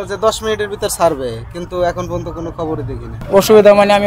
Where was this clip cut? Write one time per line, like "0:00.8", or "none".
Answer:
0:03.1